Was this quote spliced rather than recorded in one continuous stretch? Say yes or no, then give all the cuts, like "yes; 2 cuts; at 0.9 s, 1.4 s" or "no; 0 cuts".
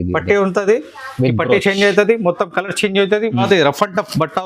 yes; 1 cut; at 3.4 s